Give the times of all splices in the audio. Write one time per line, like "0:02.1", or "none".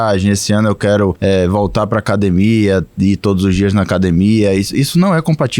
0:01.2